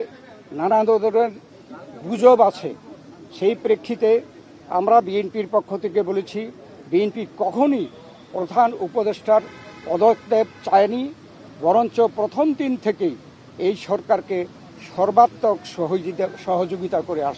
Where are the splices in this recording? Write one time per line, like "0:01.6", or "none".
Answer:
none